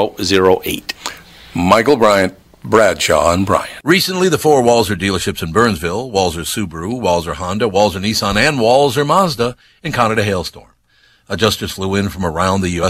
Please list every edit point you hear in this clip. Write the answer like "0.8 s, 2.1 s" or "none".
3.7 s